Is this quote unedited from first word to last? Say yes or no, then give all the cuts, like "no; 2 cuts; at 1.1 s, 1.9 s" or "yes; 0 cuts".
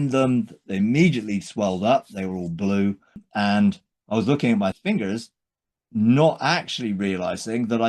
no; 2 cuts; at 3.3 s, 4.8 s